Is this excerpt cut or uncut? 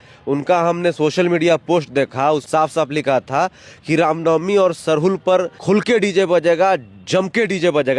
cut